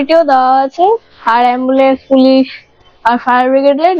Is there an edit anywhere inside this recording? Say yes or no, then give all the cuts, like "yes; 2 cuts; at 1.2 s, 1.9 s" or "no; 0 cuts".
no; 0 cuts